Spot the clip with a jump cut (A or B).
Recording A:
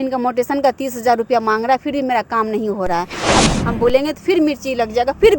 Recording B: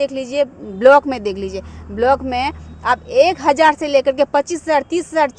A